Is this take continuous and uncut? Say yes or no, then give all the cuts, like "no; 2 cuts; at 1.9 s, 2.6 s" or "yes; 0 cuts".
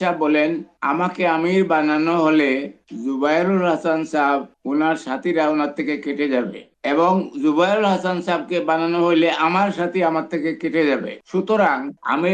yes; 0 cuts